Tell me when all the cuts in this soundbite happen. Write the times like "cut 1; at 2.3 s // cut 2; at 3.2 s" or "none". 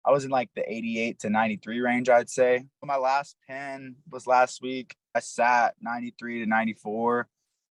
cut 1; at 2.9 s // cut 2; at 5.2 s